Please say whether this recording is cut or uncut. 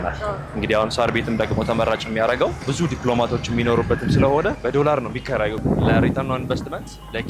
cut